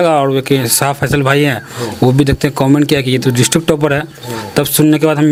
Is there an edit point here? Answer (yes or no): no